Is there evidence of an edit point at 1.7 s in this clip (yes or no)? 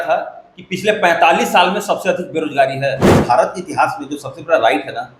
no